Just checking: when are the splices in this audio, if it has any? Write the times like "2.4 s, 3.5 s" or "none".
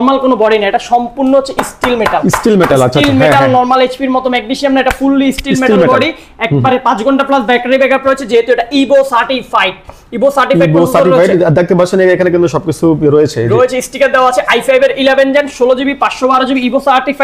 none